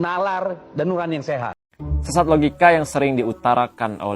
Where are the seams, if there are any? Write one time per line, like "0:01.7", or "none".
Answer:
0:01.6

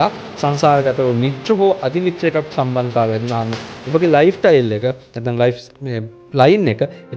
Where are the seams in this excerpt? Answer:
none

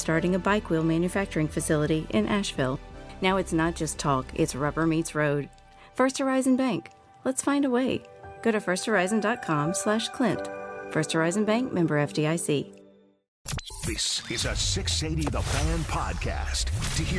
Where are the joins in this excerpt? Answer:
0:13.5

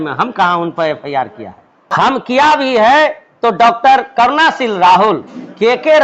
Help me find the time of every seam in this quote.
none

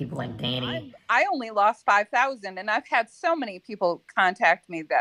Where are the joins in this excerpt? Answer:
0:01.0

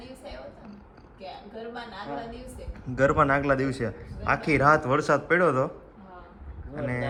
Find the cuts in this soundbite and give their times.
none

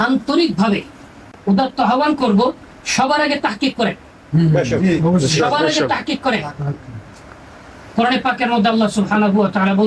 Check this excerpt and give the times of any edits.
0:01.4

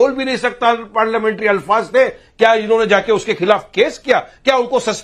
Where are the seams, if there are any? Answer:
none

